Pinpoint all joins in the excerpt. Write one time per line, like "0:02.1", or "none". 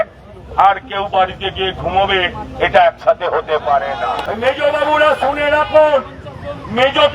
0:04.2